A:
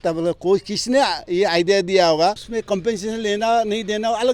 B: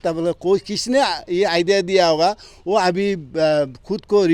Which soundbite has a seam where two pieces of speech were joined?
A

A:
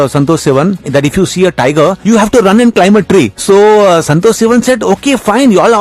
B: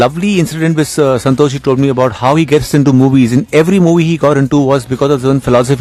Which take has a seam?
A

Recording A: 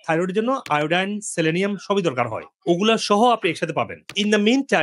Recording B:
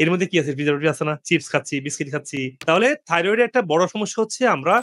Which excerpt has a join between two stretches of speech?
B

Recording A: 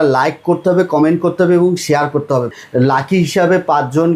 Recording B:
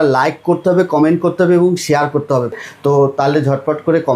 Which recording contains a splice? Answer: B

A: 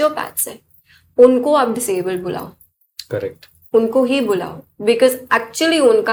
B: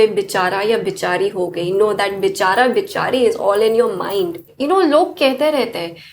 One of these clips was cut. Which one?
B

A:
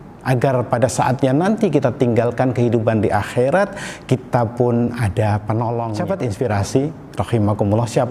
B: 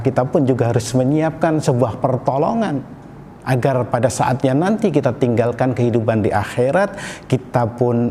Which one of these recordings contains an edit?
A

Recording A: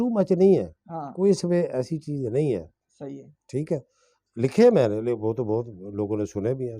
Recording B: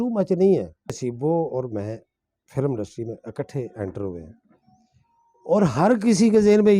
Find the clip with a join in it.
B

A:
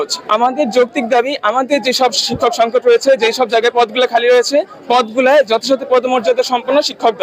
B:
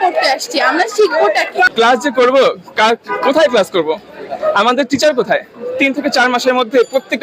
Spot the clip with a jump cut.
B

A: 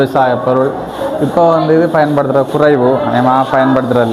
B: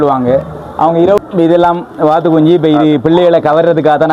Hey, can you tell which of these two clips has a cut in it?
B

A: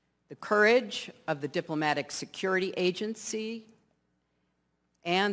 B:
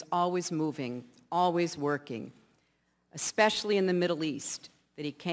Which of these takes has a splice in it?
B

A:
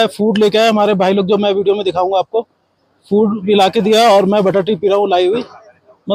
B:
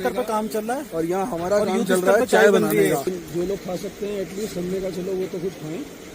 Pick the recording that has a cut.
B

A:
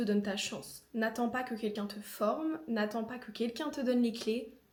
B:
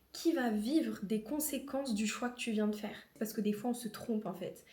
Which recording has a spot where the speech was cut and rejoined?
B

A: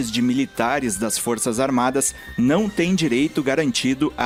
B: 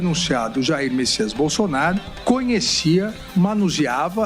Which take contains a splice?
B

